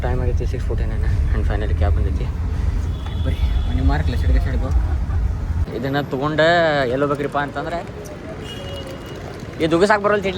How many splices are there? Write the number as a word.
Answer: one